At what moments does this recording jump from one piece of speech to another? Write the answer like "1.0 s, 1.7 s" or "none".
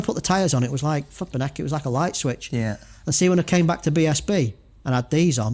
none